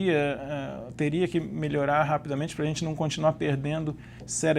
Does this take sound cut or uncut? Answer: uncut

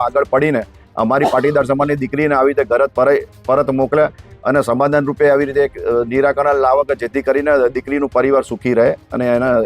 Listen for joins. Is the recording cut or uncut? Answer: uncut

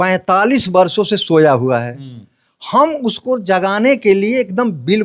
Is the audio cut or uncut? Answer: uncut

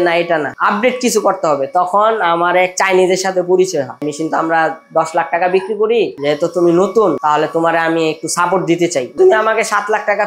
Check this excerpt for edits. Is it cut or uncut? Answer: cut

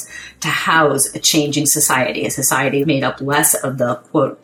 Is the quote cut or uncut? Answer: cut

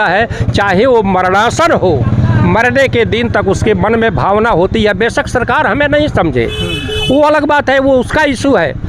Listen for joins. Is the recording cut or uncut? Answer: uncut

